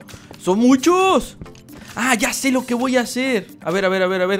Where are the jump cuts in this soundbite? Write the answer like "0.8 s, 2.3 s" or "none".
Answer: none